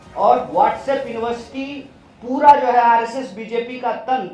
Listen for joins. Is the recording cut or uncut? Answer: uncut